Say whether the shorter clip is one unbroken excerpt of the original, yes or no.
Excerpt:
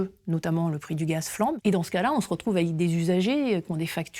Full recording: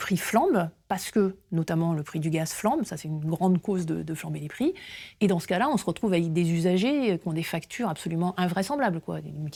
no